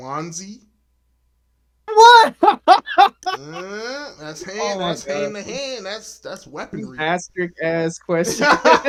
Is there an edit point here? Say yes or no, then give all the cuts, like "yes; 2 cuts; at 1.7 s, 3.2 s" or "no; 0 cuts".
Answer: no; 0 cuts